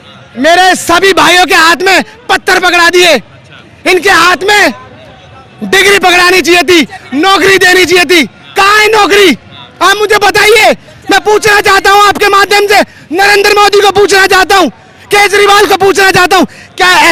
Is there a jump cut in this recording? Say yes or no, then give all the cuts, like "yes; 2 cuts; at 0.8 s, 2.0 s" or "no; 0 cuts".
no; 0 cuts